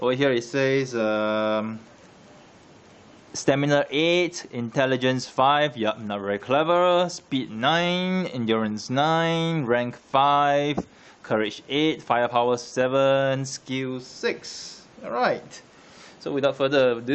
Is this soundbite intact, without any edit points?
no; 1 cut; at 1.5 s

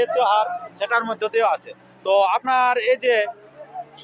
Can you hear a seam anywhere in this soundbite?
no; 0 cuts

